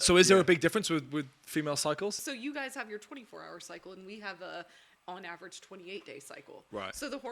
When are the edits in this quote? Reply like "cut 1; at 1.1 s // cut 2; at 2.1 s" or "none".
cut 1; at 2.2 s